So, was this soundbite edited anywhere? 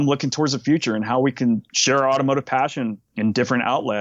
yes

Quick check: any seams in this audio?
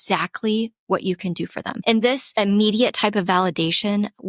yes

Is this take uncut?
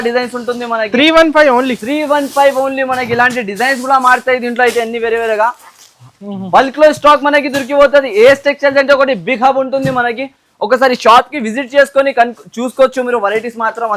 yes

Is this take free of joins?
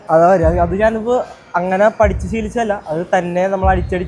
yes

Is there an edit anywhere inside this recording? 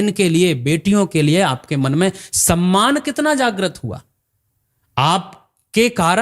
no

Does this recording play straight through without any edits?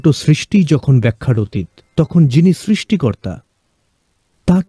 yes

